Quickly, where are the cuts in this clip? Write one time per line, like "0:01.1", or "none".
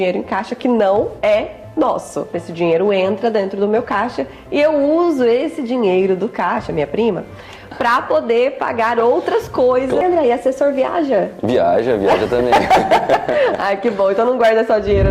0:02.4
0:10.0